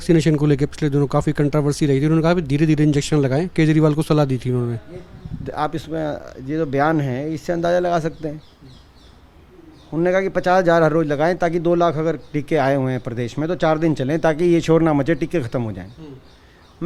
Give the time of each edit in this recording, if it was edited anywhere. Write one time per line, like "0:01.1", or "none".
none

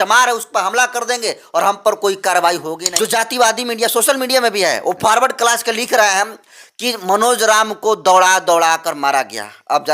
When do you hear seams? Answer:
0:02.8

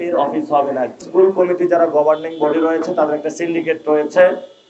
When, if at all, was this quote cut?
0:01.0

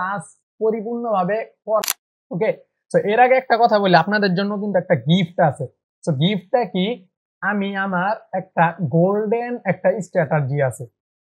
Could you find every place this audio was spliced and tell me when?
0:01.8

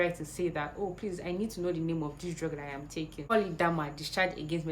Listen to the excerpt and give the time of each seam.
0:03.3

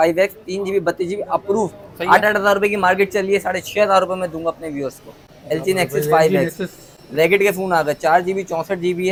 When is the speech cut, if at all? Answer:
none

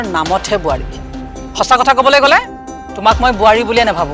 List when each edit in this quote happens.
none

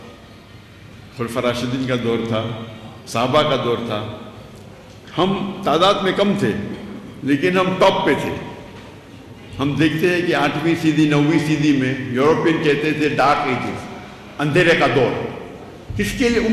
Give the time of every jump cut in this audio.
none

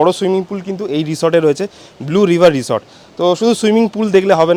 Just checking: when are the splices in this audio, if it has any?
none

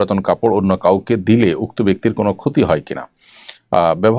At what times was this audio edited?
none

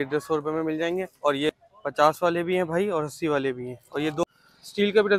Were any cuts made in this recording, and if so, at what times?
0:01.5
0:04.2

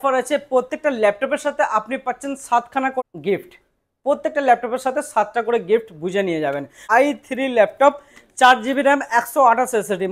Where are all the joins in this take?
0:03.0
0:06.8

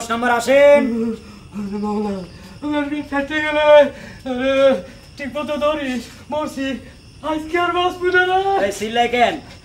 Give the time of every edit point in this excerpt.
0:04.9

